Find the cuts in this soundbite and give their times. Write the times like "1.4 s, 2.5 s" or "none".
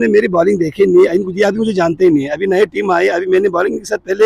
none